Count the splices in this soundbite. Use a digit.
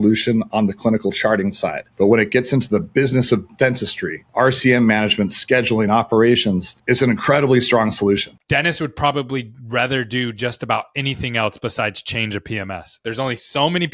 2